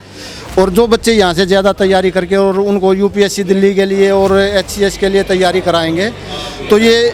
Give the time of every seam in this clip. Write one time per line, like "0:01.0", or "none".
none